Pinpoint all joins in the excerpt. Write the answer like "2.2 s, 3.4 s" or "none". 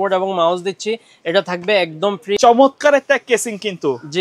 2.3 s